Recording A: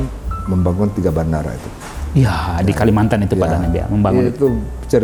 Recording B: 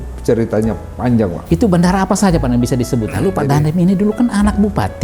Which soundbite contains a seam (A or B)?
B